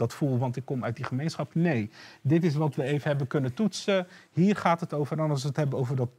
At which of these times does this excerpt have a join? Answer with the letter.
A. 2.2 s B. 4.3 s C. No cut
C